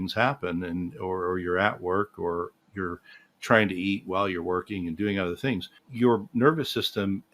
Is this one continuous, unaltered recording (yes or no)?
no